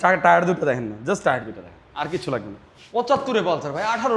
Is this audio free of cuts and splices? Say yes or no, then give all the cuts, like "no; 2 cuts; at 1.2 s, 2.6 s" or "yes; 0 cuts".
no; 1 cut; at 3.1 s